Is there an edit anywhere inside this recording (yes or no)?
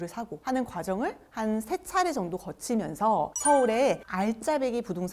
no